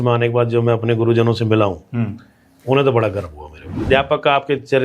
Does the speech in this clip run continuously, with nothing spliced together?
no; 1 cut; at 3.9 s

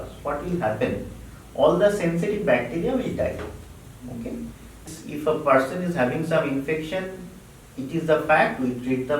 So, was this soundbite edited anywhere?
yes; 1 cut; at 4.8 s

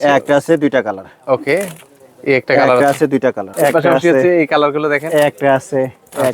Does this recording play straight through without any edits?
no; 1 cut; at 3.5 s

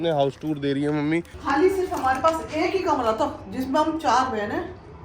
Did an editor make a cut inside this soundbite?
yes; 1 cut; at 1.4 s

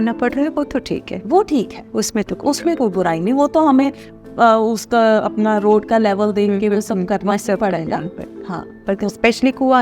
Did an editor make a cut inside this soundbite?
no; 0 cuts

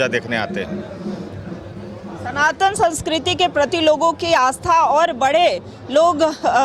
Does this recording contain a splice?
no; 0 cuts

